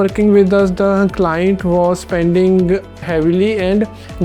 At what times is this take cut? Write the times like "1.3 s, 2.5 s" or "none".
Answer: none